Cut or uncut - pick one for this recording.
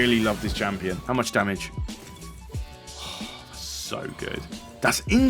cut